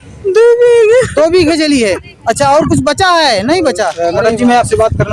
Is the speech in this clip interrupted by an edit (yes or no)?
yes